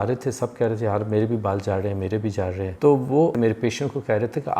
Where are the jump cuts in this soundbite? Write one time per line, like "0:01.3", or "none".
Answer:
0:02.7
0:03.3

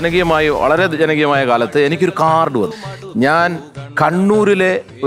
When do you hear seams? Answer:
0:02.8

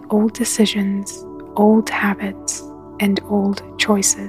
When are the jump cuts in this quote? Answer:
none

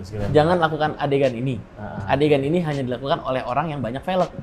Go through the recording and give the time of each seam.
none

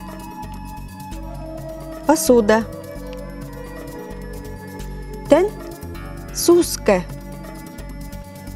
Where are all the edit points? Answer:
none

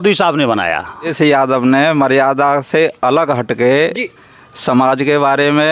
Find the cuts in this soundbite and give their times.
0:01.1

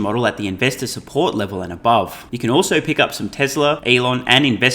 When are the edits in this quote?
0:02.3
0:03.8

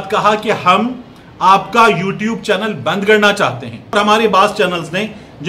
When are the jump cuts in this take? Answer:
0:03.9

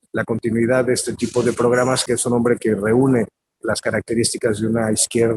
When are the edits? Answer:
0:02.0

